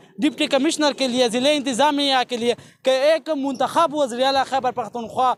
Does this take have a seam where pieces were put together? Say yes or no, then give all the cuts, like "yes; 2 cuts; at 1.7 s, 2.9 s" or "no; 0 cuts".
no; 0 cuts